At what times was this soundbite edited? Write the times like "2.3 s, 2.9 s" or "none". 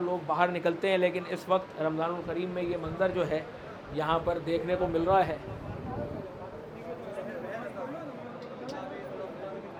none